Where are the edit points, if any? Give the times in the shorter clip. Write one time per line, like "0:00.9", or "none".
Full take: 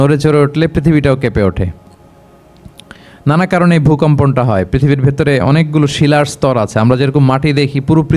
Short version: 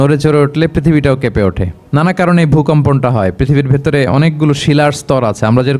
0:01.7

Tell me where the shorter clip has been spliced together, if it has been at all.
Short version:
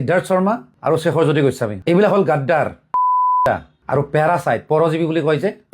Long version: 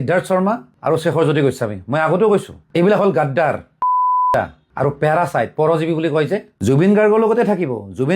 0:01.7

